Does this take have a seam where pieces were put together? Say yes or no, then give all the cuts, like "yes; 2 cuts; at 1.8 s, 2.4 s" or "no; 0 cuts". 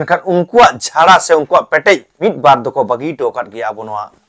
yes; 1 cut; at 2.1 s